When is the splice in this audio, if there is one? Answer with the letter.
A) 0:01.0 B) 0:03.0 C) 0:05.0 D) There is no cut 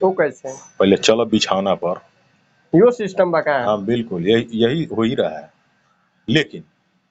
D